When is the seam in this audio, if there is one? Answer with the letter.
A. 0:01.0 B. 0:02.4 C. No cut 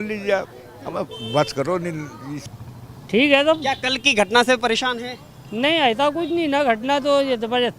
B